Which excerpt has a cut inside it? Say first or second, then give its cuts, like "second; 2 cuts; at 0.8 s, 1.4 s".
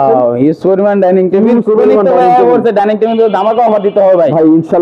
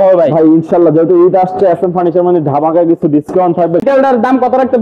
second; 1 cut; at 3.8 s